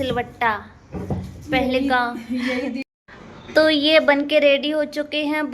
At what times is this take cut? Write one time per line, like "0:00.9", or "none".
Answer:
0:02.8